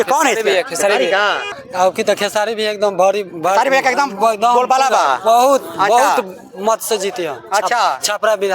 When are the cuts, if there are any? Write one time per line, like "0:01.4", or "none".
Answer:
0:01.7

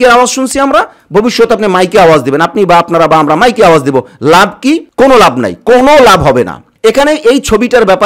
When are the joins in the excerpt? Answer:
none

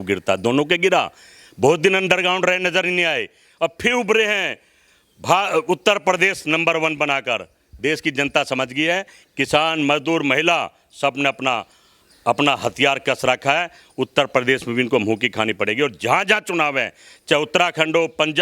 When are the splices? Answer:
none

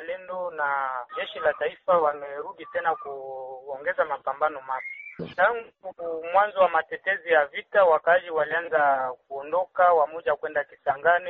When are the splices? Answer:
0:05.2

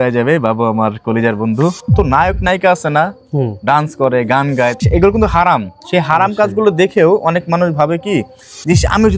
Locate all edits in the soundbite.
0:01.9
0:04.8

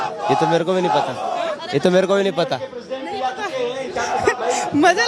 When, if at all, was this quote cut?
none

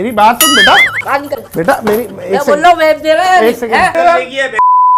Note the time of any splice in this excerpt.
0:03.9

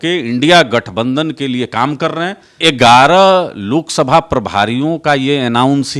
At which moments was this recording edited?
0:02.5

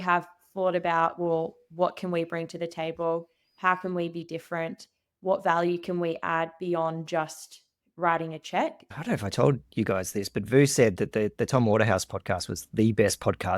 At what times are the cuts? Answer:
0:09.0

